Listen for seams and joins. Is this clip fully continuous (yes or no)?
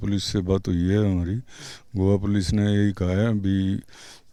yes